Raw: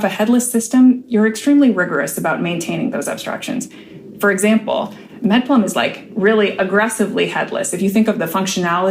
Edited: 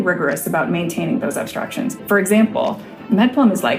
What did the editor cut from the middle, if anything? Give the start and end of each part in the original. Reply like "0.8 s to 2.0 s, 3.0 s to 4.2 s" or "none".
3.7 s to 4.1 s

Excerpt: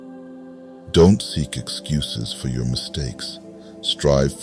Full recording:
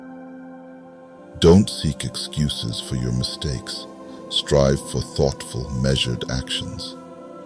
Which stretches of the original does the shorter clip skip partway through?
0.9 s to 1.4 s

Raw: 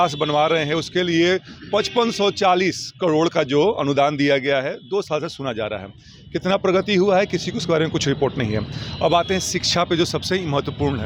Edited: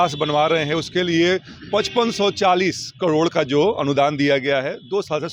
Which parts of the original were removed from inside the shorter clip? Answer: none

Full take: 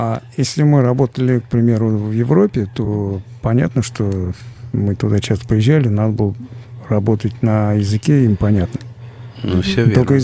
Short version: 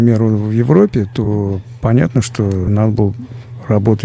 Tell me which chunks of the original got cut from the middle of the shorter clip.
4.3 s to 5.9 s

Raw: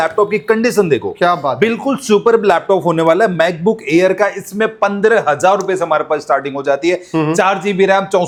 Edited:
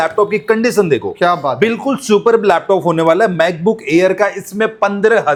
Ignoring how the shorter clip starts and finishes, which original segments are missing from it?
none

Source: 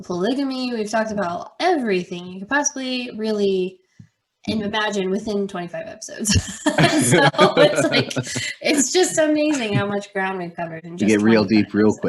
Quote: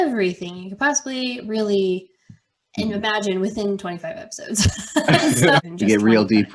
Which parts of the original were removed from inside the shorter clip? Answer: 7.3 s to 10.8 s

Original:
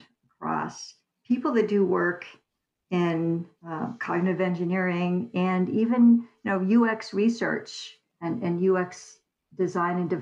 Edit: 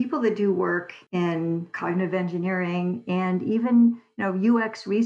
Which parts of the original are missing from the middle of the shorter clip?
2.3 s to 2.8 s, 3.5 s to 4.0 s

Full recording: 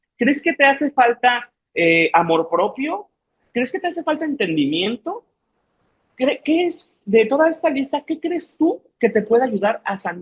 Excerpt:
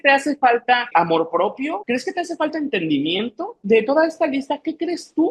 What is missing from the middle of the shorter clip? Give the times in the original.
1.4 s to 2.1 s, 3.0 s to 3.5 s, 5.1 s to 6.9 s

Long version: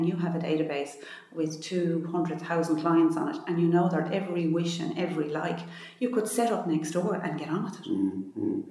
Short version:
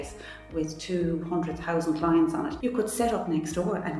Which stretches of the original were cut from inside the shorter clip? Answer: 3.4 s to 5.9 s

